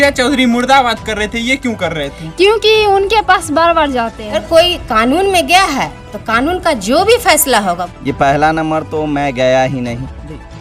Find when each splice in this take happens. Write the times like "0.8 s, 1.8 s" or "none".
4.4 s, 7.8 s

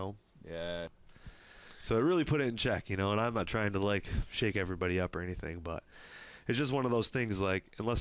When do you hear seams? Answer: 0.9 s

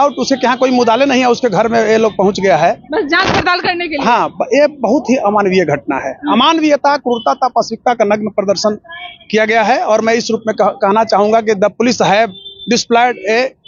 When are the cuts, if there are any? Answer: none

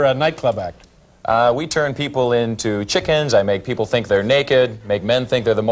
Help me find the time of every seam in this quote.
3.0 s

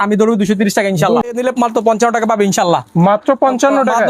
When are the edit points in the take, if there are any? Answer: 1.3 s

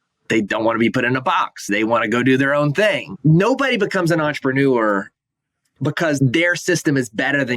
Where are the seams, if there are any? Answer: 1.7 s, 3.1 s, 6.2 s

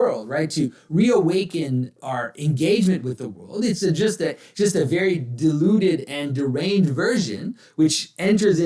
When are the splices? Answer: 1.9 s

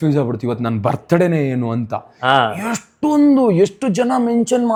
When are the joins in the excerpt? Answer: none

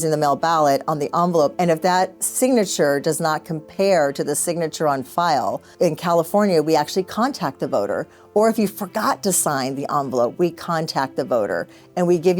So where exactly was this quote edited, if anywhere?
1.5 s, 5.7 s

